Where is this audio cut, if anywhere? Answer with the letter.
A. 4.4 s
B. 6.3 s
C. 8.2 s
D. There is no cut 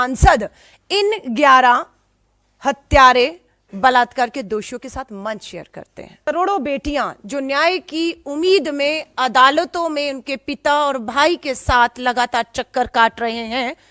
B